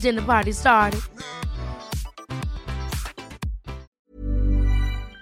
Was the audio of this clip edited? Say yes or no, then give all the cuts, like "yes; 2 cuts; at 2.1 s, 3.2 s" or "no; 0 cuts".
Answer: yes; 1 cut; at 3.9 s